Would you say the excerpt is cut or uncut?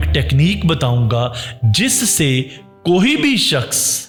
uncut